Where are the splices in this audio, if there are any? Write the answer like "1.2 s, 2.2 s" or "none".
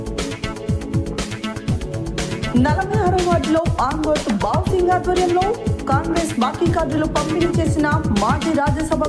1.3 s